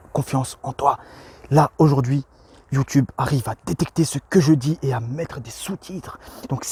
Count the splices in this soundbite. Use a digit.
0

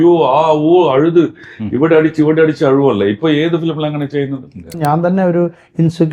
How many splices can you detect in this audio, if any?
1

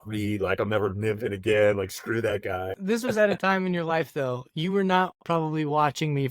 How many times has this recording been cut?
1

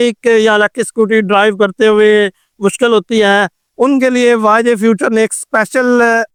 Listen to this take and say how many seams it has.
0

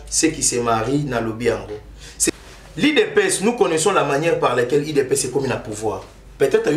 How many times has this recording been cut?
1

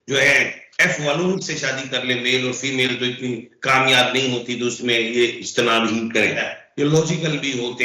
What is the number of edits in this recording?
1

